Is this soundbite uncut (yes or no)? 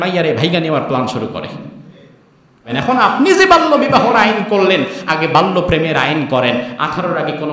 no